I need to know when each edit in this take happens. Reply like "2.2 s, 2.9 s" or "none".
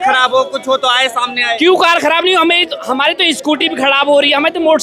none